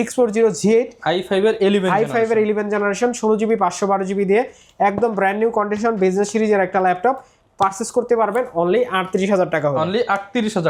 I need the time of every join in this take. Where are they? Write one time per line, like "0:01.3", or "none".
none